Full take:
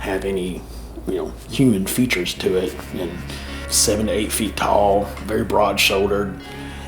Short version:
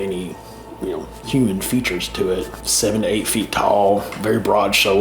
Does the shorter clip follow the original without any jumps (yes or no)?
no